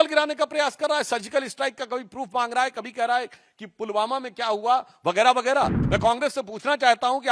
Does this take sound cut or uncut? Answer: cut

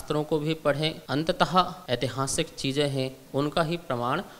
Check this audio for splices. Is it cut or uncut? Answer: cut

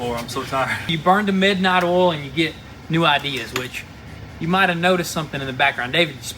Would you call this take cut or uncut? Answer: cut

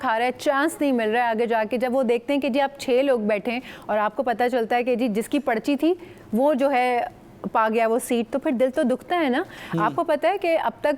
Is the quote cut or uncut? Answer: uncut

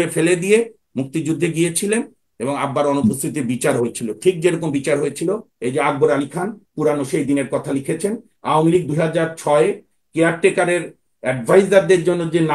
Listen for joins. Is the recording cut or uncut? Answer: uncut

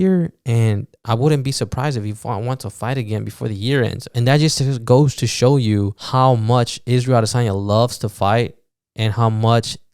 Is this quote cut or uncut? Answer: cut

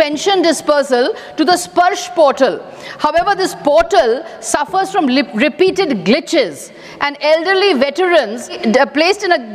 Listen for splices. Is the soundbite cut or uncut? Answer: cut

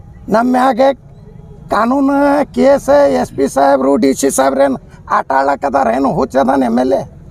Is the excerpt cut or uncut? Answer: uncut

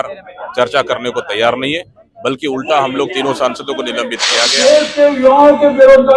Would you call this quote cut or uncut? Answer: cut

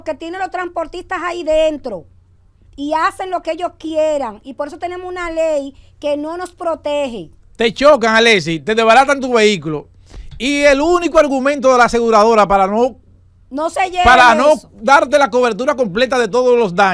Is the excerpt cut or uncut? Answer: uncut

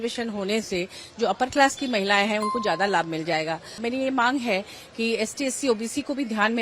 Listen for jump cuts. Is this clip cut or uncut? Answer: cut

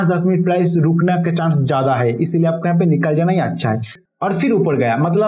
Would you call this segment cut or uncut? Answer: cut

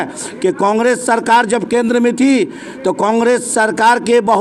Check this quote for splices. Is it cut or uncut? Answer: uncut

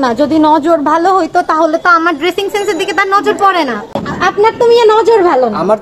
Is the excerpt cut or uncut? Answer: cut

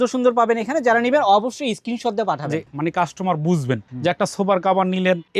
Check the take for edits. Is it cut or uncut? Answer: cut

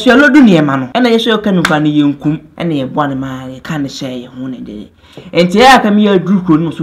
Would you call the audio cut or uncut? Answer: cut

